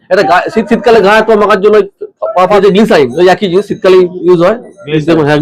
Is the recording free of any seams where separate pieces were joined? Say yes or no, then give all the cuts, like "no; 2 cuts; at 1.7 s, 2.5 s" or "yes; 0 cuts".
no; 1 cut; at 2.6 s